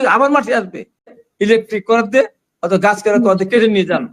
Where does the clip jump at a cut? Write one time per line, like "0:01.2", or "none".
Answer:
0:01.2